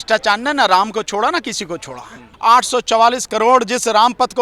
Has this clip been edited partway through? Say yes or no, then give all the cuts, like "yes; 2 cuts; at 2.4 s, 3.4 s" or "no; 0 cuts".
yes; 1 cut; at 2.3 s